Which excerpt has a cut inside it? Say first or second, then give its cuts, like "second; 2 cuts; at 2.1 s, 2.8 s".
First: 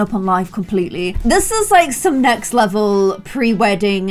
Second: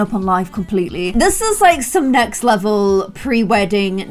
second; 1 cut; at 1.1 s